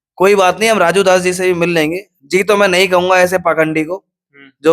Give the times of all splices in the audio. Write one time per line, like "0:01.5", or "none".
none